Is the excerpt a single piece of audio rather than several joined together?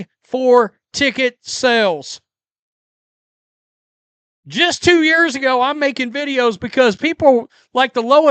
yes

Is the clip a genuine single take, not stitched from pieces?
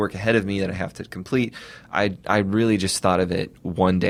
yes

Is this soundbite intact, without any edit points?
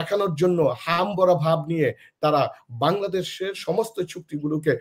yes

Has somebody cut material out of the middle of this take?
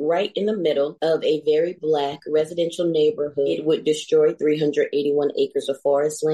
yes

